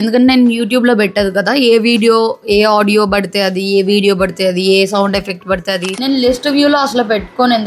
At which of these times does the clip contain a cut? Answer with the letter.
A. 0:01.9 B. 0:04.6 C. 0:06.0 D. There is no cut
C